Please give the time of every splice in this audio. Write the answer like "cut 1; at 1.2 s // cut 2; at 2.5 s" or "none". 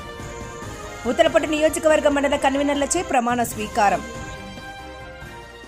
none